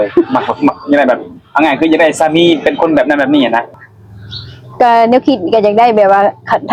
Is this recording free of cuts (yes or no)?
no